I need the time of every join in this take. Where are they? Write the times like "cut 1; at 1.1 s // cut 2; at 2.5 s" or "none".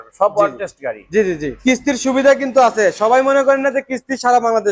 cut 1; at 1.5 s